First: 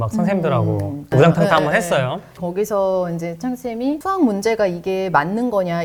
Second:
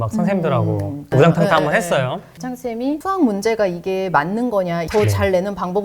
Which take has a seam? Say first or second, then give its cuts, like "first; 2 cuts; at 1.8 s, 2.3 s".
second; 2 cuts; at 2.3 s, 4.9 s